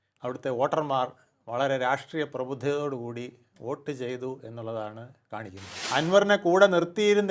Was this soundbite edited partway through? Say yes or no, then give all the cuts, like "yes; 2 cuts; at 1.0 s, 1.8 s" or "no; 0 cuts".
yes; 1 cut; at 5.7 s